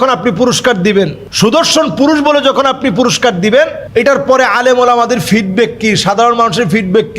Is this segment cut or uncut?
cut